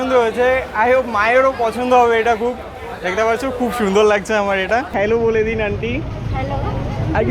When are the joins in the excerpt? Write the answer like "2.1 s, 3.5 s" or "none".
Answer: 4.9 s

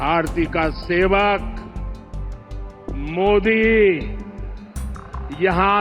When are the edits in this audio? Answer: none

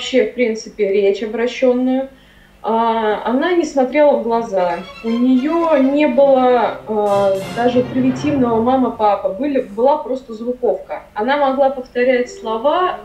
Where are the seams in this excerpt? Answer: none

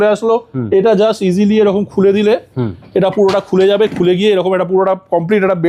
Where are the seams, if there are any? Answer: none

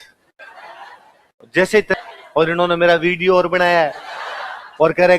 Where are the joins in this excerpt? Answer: 2.0 s

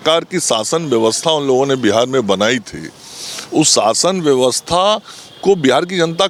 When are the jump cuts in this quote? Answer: none

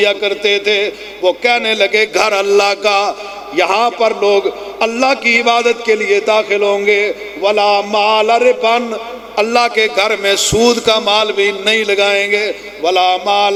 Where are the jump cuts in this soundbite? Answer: none

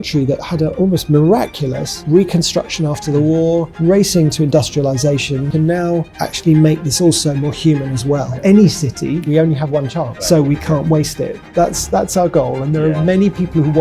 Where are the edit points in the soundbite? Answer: 5.5 s, 8.3 s, 9.2 s, 10.2 s, 11.4 s

